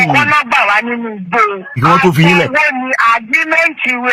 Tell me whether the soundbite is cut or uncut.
cut